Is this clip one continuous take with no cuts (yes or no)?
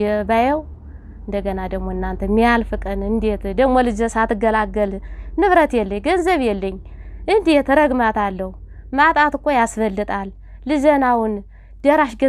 yes